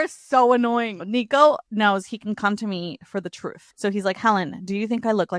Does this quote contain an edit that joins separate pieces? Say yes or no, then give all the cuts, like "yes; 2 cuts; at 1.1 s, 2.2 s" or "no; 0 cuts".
yes; 3 cuts; at 1.0 s, 1.6 s, 3.6 s